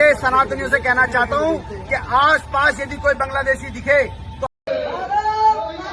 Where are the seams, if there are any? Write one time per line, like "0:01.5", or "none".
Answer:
none